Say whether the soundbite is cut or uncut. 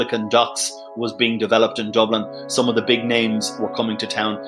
uncut